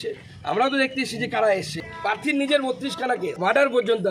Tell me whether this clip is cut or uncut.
cut